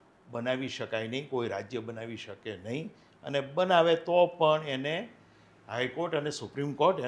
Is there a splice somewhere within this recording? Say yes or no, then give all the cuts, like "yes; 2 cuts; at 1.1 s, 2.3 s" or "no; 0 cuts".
no; 0 cuts